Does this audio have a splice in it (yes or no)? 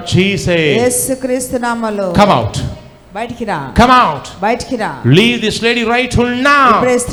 no